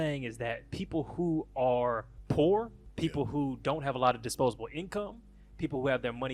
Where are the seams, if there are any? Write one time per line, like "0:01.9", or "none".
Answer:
0:02.1
0:02.8